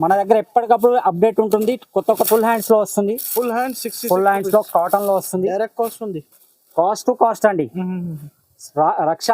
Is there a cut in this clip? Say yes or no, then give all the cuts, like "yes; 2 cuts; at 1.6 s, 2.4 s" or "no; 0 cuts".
yes; 1 cut; at 2.1 s